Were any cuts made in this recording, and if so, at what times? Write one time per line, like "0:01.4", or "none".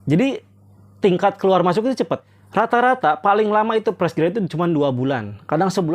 0:02.4

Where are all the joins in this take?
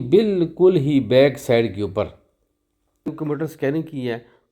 0:03.1

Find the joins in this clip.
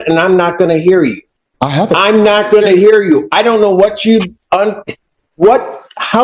none

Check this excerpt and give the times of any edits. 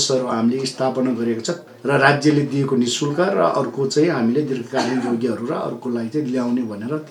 0:01.5

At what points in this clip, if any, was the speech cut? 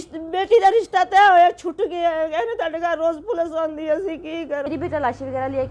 0:04.7

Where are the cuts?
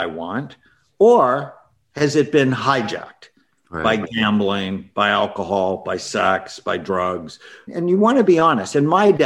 none

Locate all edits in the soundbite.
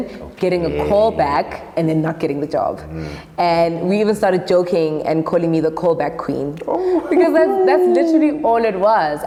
none

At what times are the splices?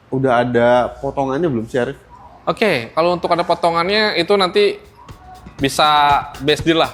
none

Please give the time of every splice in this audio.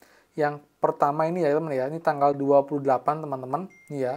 none

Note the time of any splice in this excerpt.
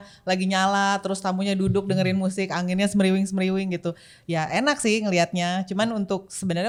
none

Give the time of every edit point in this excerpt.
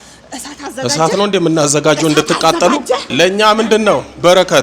0:03.1

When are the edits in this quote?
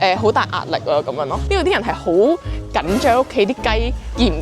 0:01.4

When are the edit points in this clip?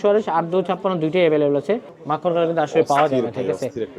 0:01.9

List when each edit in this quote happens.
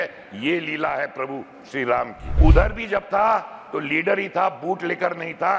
0:02.2

